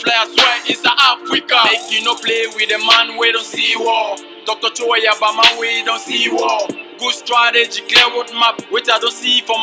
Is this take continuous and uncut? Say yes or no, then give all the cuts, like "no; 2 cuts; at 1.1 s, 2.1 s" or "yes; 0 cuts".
yes; 0 cuts